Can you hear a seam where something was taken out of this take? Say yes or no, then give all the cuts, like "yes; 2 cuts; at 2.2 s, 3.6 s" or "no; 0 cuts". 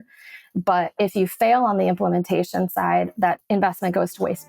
yes; 1 cut; at 3.4 s